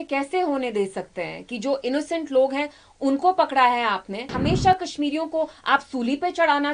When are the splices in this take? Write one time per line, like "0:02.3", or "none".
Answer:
0:04.3